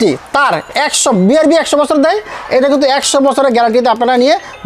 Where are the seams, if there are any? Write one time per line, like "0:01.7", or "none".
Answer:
none